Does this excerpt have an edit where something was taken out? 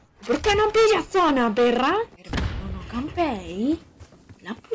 yes; 1 cut; at 2.2 s

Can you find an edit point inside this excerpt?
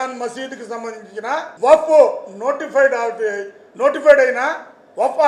yes; 1 cut; at 1.5 s

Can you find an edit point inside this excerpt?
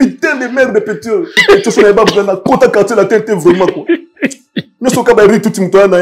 yes; 1 cut; at 1.4 s

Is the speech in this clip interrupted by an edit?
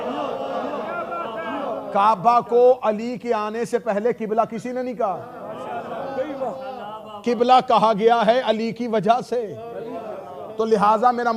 no; 0 cuts

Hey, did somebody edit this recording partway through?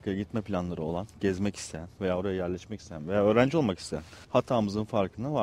yes; 1 cut; at 4.2 s

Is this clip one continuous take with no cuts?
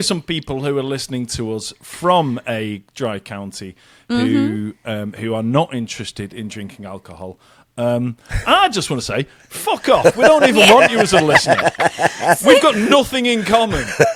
yes; 0 cuts

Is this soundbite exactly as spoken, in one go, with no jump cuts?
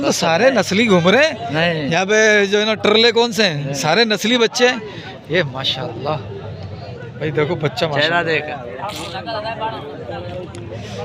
yes; 0 cuts

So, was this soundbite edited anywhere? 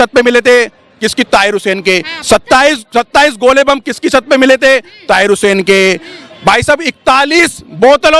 no; 0 cuts

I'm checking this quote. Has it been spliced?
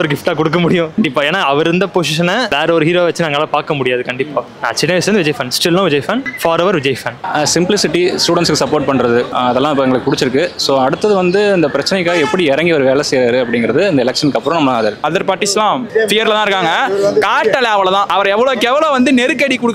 yes; 4 cuts; at 7.2 s, 15.0 s, 15.9 s, 18.1 s

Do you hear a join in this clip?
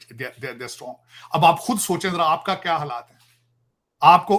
no; 0 cuts

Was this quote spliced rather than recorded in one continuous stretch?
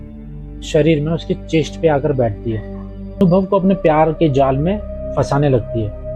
yes; 1 cut; at 3.1 s

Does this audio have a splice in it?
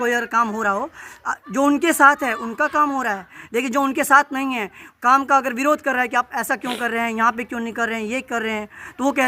no; 0 cuts

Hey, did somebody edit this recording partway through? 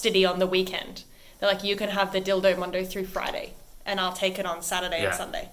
no; 0 cuts

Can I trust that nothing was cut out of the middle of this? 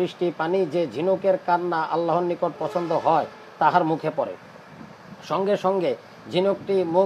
yes; 0 cuts

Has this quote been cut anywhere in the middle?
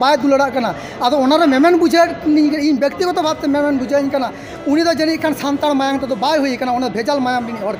no; 0 cuts

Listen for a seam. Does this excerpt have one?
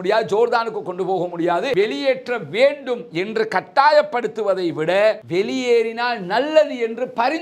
yes; 1 cut; at 1.7 s

